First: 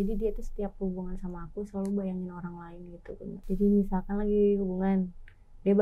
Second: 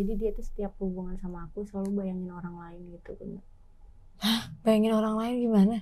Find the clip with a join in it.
first; 1 cut; at 3.4 s

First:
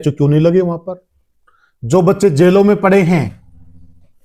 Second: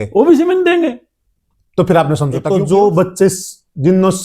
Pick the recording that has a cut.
second; 1 cut; at 2.4 s

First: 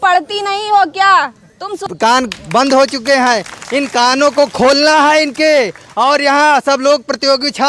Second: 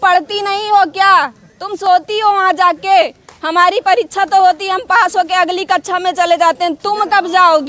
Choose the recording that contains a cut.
first; 1 cut; at 1.7 s

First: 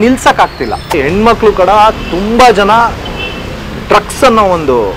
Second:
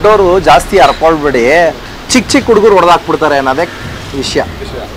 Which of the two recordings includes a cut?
first; 1 cut; at 1.0 s

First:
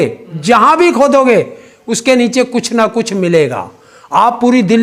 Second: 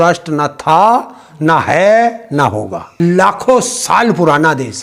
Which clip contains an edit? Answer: second; 1 cut; at 2.8 s

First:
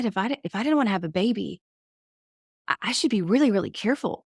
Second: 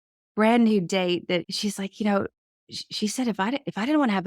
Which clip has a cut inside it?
second; 1 cut; at 1.4 s

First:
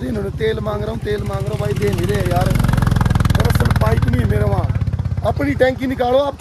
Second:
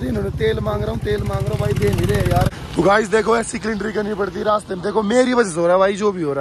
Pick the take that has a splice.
second; 1 cut; at 2.5 s

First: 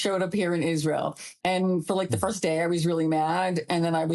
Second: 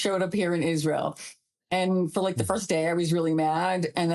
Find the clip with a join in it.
first; 1 cut; at 1.3 s

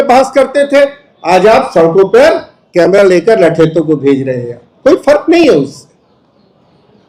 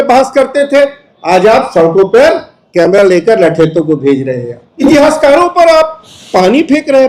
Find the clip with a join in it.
second; 1 cut; at 4.6 s

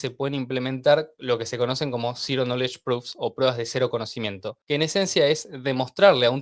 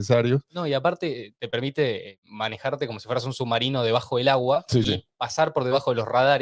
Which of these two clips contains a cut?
second; 1 cut; at 1.3 s

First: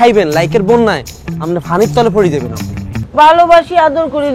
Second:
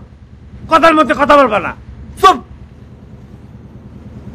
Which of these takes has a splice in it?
first; 1 cut; at 3.0 s

